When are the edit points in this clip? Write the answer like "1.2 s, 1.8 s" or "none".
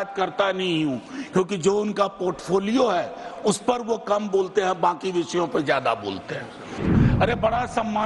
6.8 s